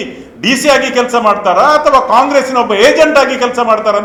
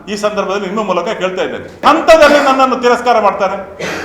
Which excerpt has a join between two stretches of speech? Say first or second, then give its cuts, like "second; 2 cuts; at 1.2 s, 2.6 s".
second; 1 cut; at 1.8 s